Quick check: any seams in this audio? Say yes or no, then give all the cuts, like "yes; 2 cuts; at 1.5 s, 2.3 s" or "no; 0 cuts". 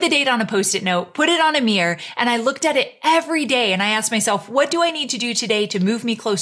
no; 0 cuts